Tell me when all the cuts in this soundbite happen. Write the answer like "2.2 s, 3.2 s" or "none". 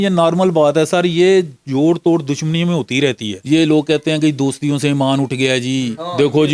3.4 s